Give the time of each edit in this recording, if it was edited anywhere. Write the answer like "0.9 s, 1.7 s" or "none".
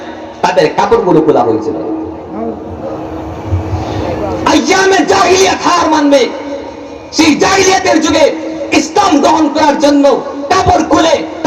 none